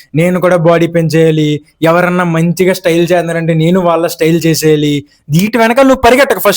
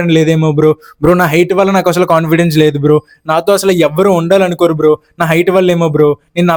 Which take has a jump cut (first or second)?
first